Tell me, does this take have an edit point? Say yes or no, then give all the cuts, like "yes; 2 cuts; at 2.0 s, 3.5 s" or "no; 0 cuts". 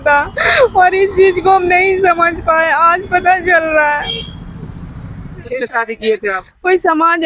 yes; 1 cut; at 5.4 s